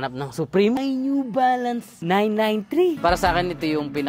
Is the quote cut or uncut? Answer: cut